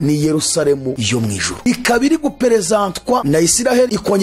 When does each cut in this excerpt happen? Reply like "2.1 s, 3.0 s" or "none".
none